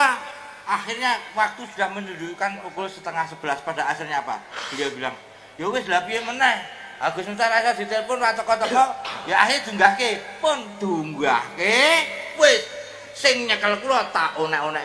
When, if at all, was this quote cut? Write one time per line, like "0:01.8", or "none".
none